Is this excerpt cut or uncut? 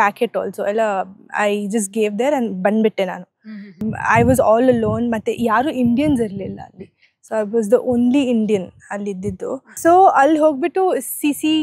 cut